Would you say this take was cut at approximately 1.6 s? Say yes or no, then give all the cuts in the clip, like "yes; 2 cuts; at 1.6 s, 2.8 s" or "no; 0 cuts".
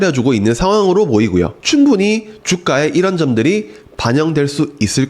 yes; 1 cut; at 1.6 s